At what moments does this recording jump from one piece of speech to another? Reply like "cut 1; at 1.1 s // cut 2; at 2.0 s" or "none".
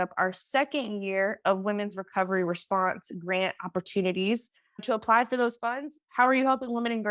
cut 1; at 4.7 s